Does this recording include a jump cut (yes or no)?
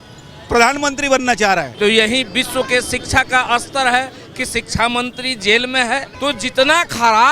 yes